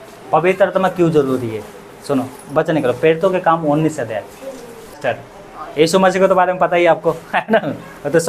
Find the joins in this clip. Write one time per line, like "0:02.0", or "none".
0:05.0

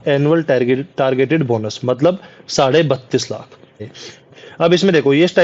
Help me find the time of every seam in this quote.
0:03.8

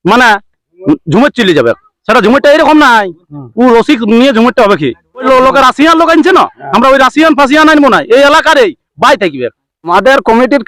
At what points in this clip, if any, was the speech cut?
0:05.2
0:09.9

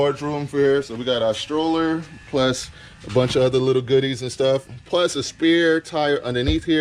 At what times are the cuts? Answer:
none

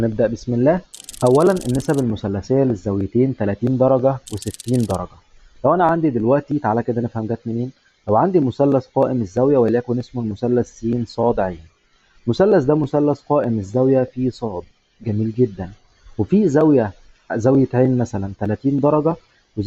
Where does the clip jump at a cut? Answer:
0:01.0

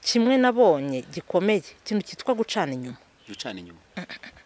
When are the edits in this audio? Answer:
none

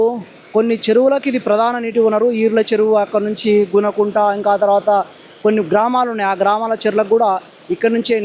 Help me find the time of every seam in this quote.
none

